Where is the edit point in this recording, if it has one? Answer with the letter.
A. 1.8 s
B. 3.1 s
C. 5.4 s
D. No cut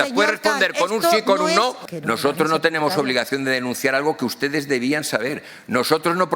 A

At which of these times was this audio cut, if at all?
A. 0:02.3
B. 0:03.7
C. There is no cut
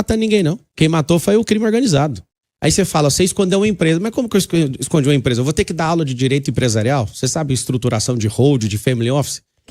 A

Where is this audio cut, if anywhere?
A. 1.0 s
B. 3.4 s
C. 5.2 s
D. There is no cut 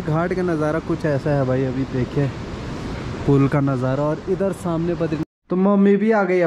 C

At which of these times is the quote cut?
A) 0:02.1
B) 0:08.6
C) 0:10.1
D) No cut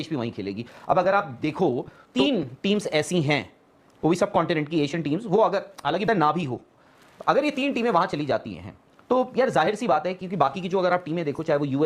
A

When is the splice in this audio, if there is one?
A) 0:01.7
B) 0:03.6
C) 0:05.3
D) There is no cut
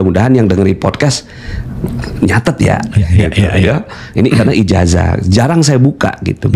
D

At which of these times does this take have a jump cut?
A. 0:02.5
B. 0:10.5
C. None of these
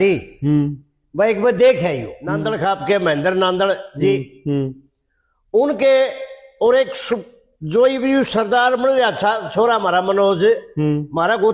A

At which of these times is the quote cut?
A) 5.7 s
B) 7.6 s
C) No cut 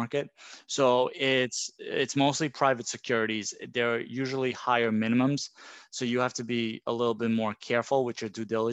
C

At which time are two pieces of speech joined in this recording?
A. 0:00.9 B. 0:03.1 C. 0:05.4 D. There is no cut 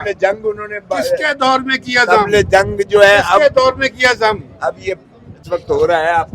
C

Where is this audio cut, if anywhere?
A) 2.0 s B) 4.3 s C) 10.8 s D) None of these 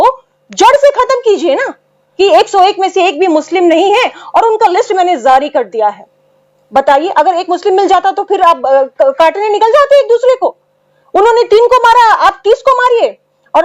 A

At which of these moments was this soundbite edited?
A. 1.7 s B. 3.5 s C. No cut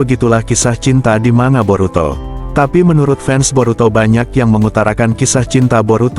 C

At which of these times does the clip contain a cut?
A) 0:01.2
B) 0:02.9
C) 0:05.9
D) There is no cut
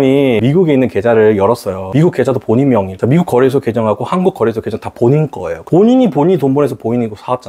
B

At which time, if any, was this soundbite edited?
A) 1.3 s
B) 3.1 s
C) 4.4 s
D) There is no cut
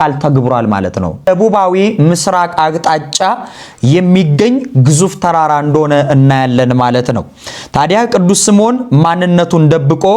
A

